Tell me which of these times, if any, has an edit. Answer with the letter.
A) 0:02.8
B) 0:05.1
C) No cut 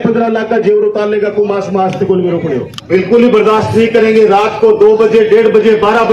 A